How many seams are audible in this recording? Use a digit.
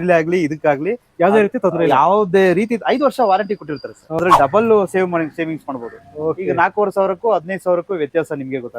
1